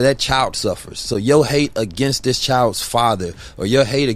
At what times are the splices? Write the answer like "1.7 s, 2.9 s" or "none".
none

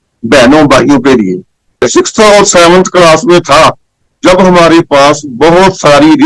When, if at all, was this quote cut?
1.5 s

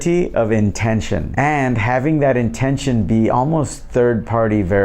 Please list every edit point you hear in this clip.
1.3 s

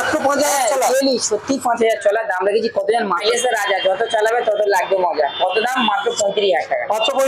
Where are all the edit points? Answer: 3.2 s

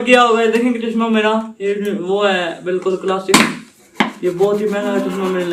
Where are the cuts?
none

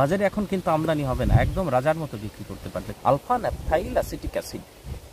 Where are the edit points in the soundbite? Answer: 2.9 s

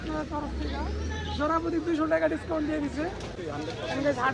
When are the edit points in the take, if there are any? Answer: 3.3 s

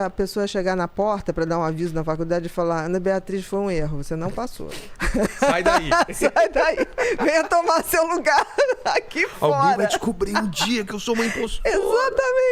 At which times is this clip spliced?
none

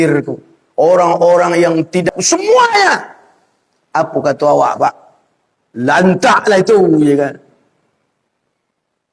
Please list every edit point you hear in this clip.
2.1 s

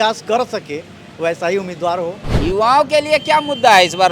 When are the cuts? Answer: 2.3 s

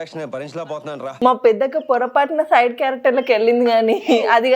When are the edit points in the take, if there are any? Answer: 1.1 s

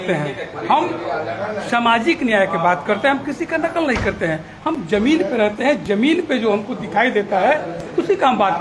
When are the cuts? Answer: none

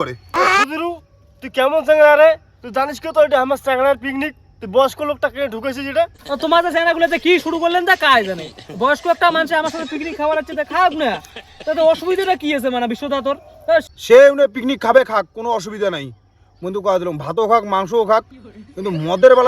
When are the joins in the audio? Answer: none

